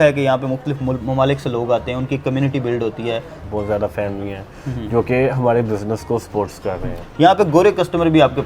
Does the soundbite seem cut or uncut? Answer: cut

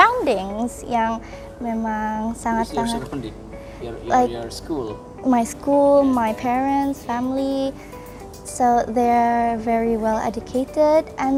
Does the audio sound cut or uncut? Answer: uncut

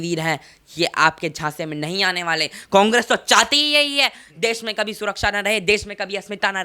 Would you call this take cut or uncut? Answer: uncut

